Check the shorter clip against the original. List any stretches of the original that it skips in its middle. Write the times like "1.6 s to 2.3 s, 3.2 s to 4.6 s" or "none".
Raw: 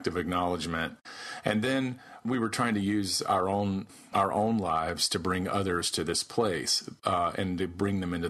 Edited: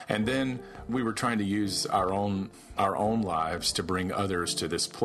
none